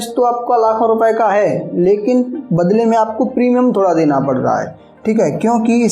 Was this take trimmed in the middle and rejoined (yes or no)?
yes